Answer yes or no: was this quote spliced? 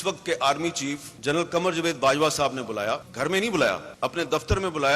yes